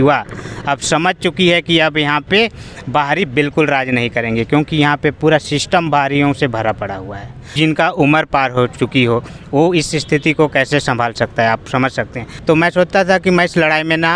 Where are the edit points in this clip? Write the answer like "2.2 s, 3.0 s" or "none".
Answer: 7.5 s, 12.2 s